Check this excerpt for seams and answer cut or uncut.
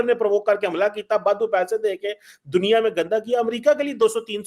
uncut